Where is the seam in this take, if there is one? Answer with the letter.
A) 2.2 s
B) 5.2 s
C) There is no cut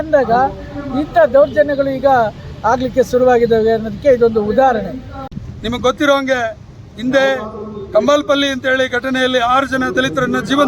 B